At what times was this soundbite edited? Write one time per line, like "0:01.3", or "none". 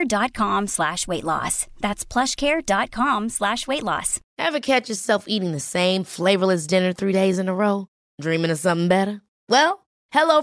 none